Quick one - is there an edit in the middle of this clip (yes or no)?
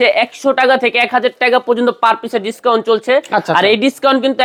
no